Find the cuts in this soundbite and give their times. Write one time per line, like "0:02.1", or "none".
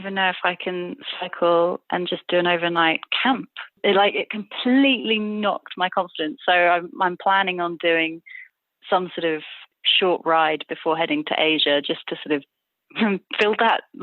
0:03.7